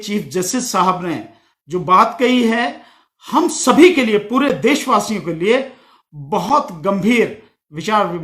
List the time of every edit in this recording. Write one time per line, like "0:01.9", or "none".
none